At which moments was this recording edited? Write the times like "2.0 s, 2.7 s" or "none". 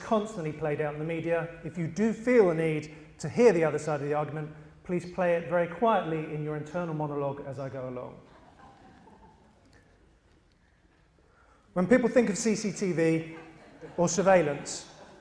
9.7 s